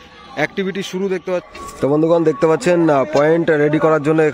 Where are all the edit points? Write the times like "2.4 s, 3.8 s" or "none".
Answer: 1.5 s

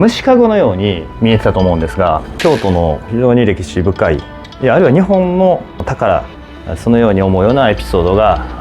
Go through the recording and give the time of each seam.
1.1 s, 2.3 s, 5.8 s

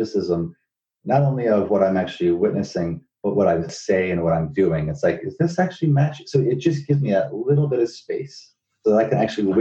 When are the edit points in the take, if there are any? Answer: 3.7 s, 8.7 s

